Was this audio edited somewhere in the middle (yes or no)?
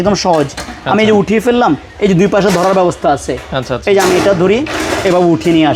no